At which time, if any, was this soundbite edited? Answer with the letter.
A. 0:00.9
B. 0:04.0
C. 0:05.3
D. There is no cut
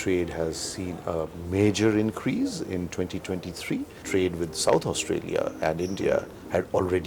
B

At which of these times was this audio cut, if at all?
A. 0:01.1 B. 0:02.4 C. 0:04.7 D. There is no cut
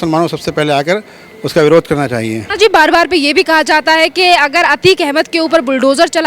D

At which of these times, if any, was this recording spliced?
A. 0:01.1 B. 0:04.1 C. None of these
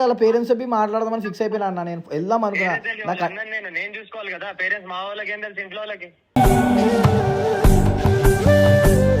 C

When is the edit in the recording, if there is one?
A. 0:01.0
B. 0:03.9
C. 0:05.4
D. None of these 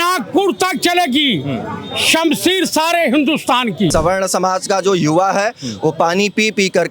B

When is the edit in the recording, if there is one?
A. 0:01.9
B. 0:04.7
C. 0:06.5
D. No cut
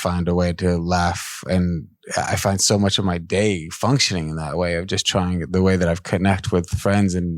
D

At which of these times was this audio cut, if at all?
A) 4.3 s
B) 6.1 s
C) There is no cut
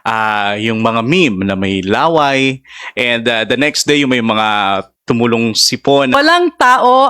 B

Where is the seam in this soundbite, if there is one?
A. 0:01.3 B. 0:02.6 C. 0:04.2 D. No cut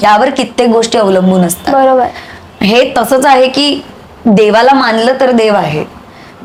D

